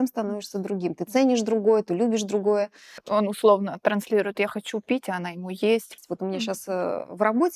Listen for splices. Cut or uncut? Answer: cut